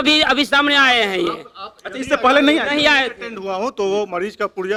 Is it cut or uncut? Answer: uncut